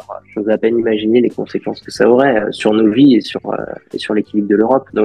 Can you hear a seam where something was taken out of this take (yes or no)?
no